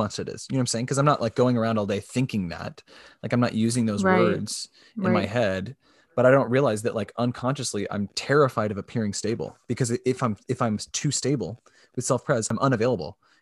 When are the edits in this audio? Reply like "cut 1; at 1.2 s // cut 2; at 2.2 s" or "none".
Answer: cut 1; at 12.5 s